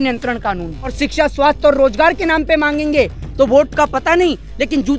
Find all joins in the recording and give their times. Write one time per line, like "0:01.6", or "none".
0:00.9